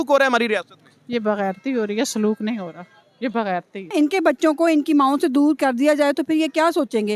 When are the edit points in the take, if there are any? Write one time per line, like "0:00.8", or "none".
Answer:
0:03.9